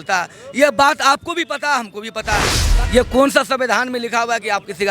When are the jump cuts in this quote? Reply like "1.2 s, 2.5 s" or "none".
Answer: 2.6 s